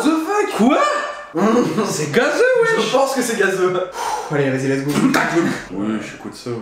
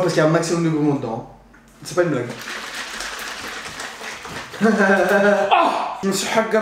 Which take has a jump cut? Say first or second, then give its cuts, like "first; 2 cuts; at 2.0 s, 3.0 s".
first; 1 cut; at 3.9 s